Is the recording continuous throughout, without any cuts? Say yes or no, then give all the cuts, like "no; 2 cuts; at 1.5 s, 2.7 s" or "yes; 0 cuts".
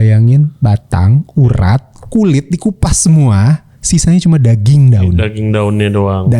yes; 0 cuts